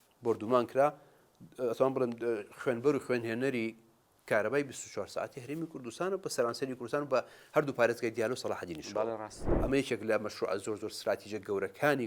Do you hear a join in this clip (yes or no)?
no